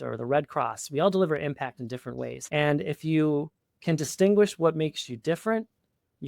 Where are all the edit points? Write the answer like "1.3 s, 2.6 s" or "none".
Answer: 2.4 s